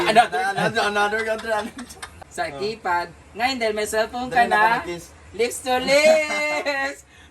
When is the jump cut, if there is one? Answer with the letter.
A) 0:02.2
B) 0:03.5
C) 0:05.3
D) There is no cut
A